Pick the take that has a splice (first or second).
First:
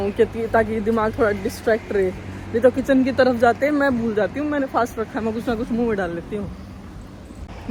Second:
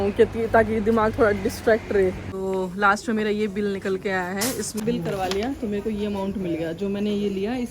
second